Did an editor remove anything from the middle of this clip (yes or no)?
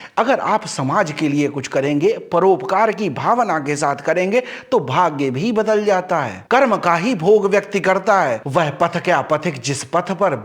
yes